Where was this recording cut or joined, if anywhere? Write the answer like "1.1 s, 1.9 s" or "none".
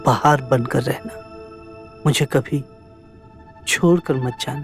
none